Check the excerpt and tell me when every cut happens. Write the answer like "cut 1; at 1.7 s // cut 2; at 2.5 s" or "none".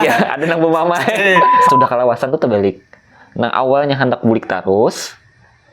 cut 1; at 1.6 s